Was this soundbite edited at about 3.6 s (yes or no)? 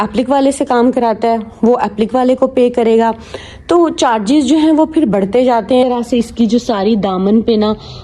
no